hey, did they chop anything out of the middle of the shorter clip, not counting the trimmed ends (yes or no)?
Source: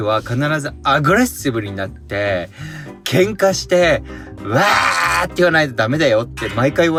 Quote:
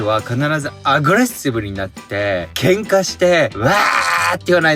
yes